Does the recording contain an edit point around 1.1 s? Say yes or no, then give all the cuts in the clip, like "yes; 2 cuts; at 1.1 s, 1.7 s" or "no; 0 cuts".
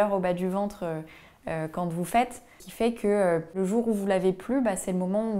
no; 2 cuts; at 2.6 s, 3.6 s